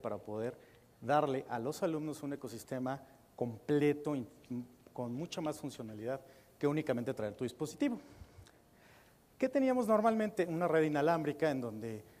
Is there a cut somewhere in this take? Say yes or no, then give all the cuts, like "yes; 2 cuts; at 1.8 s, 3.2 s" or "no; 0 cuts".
no; 0 cuts